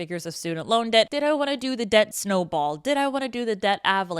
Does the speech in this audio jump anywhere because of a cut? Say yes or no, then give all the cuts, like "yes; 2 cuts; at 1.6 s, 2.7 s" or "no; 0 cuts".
yes; 2 cuts; at 1.1 s, 2.2 s